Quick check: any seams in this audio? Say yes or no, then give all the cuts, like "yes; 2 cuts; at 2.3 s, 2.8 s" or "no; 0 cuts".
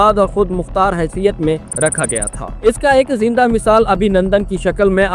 yes; 1 cut; at 2.7 s